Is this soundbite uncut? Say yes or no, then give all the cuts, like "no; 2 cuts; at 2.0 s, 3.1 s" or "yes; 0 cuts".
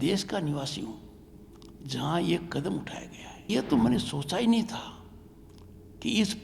no; 1 cut; at 3.5 s